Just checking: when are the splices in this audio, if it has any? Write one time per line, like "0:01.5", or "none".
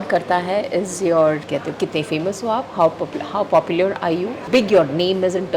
0:01.4
0:04.4